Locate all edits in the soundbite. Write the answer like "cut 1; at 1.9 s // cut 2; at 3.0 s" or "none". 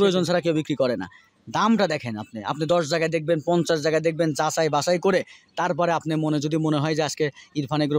none